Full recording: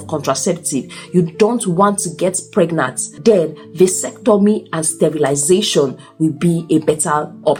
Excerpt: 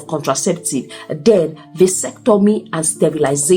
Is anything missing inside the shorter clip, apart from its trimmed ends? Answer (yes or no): yes